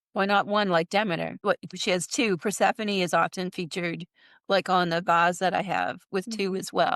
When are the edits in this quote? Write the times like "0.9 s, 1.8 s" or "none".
1.8 s

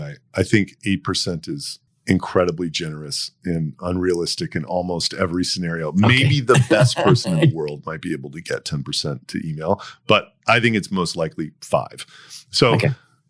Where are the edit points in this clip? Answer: 1.9 s

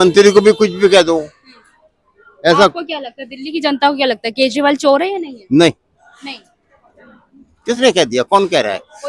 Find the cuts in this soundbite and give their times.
none

